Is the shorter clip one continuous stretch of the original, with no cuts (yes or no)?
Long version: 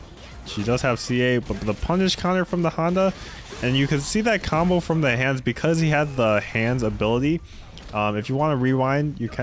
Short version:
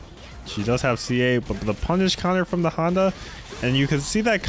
yes